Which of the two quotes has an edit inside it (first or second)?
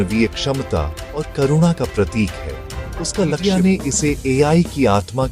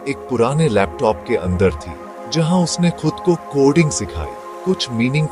first